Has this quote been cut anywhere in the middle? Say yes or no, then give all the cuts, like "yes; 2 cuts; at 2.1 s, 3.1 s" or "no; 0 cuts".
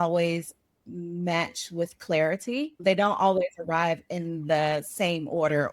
yes; 1 cut; at 2.8 s